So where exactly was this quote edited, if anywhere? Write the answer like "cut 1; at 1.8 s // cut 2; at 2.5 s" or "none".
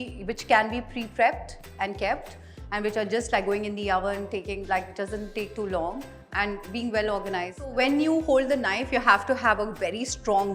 cut 1; at 7.7 s